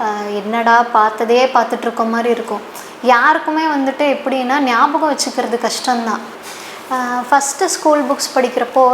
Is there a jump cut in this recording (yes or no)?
yes